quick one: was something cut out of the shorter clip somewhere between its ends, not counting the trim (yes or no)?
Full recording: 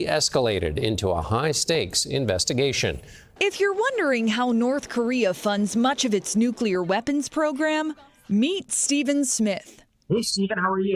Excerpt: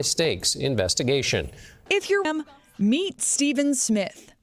yes